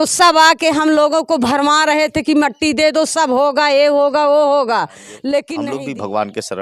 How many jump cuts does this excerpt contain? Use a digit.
1